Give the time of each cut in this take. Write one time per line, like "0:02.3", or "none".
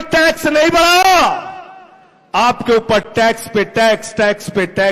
none